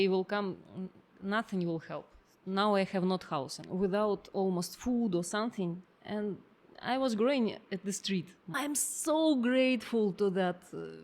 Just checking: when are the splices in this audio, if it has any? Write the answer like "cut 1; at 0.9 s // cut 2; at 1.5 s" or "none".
cut 1; at 3.6 s // cut 2; at 8.5 s